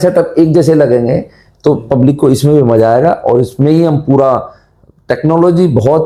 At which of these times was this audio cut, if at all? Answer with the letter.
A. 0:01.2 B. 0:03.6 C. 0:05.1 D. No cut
D